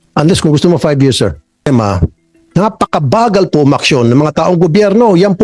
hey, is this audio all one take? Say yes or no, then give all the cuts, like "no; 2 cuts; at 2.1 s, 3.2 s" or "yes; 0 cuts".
no; 1 cut; at 1.7 s